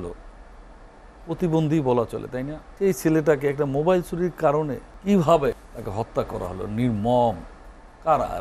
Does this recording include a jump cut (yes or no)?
yes